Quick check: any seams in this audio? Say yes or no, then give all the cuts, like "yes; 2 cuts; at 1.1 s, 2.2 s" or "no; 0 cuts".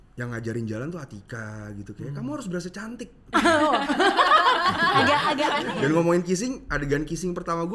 yes; 1 cut; at 5.6 s